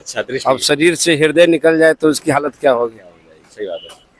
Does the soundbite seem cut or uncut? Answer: uncut